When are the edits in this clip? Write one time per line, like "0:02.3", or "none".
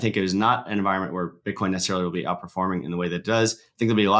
none